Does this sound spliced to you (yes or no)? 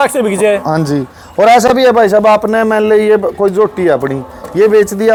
no